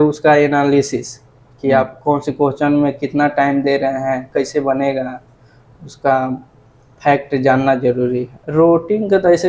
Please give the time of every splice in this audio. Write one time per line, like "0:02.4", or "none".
0:08.3